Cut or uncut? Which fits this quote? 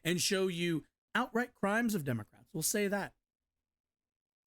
cut